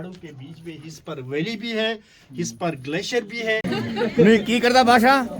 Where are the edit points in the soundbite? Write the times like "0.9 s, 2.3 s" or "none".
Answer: 3.8 s